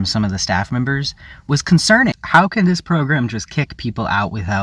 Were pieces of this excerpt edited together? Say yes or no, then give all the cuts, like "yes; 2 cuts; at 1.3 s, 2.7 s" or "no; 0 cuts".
yes; 1 cut; at 2.2 s